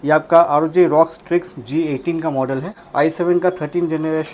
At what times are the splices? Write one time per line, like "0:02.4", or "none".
0:02.8